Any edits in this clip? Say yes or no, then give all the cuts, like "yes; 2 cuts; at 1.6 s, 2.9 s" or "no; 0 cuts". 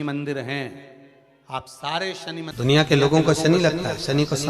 yes; 1 cut; at 2.5 s